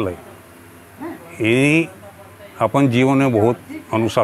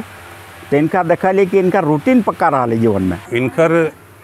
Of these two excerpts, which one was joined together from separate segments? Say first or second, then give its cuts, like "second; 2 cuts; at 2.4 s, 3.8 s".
second; 1 cut; at 3.2 s